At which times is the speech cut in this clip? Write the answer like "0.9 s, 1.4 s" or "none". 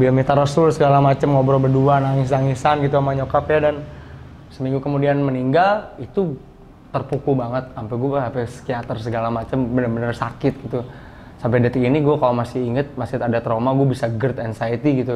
none